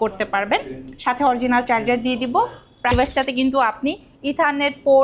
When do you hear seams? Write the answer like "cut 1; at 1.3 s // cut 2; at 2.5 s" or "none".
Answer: cut 1; at 2.9 s

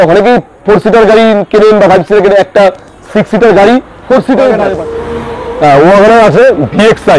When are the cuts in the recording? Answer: cut 1; at 4.8 s

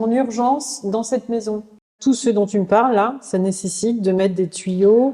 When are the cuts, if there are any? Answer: cut 1; at 1.9 s

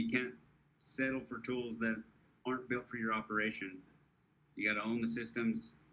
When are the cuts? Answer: cut 1; at 2.2 s

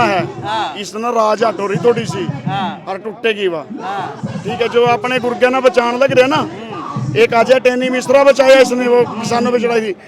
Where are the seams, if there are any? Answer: none

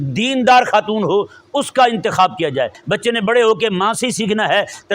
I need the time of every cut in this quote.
cut 1; at 2.8 s

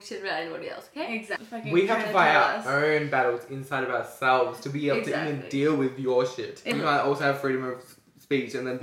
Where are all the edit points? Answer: cut 1; at 1.4 s // cut 2; at 6.7 s

